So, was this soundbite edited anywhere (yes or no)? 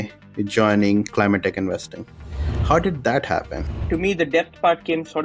yes